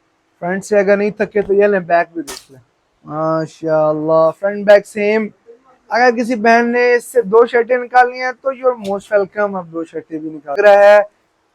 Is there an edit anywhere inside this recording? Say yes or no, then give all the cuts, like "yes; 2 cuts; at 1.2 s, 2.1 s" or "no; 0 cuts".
yes; 1 cut; at 10.6 s